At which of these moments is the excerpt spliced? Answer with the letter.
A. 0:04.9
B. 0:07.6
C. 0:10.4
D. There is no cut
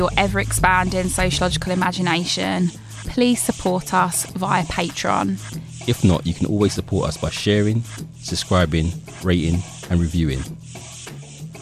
C